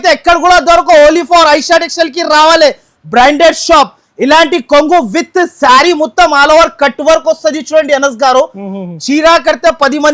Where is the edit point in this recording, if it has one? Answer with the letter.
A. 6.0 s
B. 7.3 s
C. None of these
C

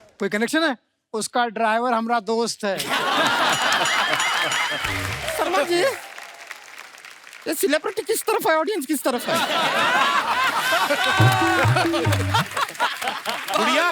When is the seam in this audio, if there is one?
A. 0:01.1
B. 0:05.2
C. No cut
B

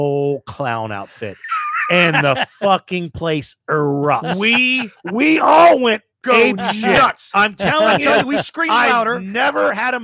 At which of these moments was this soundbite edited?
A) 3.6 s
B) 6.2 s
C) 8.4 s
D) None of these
D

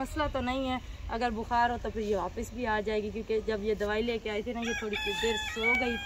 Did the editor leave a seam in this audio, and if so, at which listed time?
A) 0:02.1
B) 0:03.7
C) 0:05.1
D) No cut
D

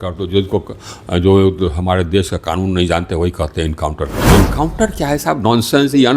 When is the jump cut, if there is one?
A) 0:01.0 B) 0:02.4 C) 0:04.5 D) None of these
C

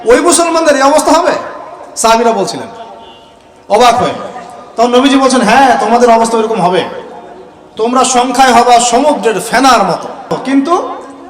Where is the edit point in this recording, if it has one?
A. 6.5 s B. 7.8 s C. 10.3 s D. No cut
C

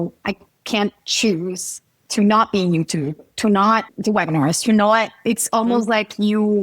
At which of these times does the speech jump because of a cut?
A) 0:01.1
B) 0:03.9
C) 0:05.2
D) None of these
B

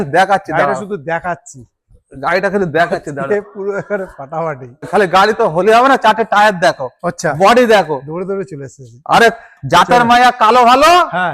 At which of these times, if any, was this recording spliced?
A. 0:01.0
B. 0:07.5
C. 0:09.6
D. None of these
D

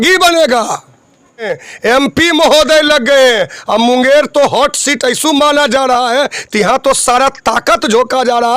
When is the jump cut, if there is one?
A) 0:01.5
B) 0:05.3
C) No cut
A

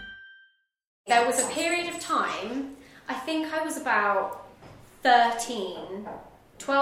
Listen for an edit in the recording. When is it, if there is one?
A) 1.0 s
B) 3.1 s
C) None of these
A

